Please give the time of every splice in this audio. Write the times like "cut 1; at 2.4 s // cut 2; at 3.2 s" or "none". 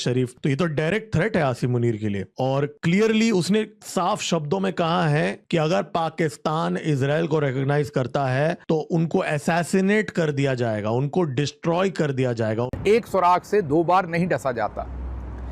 cut 1; at 12.8 s